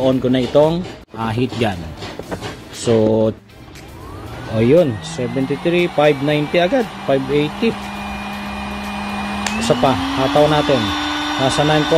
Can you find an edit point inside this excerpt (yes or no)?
yes